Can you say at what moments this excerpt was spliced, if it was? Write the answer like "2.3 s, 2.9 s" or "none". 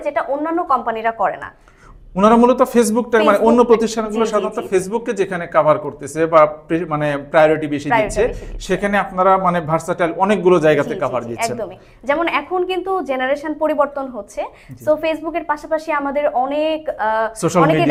none